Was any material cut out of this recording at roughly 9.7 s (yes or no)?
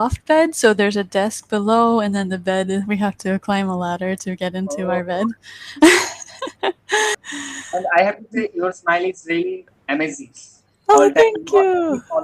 yes